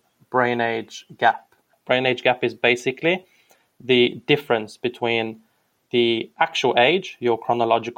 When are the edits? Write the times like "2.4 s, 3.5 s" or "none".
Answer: 1.7 s